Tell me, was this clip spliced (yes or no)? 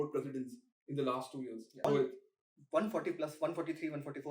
yes